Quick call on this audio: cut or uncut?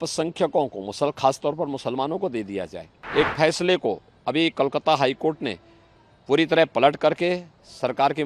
cut